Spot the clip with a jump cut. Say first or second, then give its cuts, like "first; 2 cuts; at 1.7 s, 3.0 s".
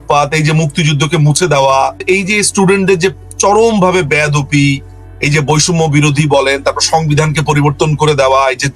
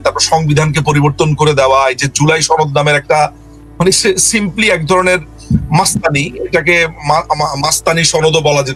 first; 1 cut; at 2.0 s